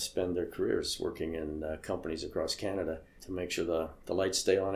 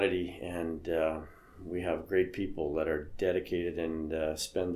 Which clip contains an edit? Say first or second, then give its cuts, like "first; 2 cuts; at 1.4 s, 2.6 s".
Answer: first; 1 cut; at 3.2 s